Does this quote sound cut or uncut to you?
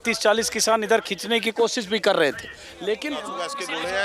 cut